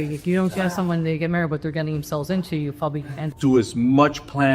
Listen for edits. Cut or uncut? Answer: cut